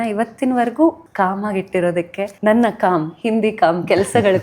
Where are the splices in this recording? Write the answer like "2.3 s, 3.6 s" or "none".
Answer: 1.0 s, 2.2 s